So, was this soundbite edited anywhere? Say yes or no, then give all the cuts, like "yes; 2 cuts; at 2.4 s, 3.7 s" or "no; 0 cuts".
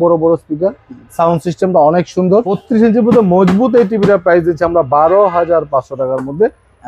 yes; 1 cut; at 2.6 s